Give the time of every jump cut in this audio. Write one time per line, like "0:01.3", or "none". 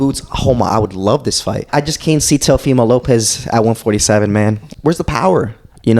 0:01.6
0:04.6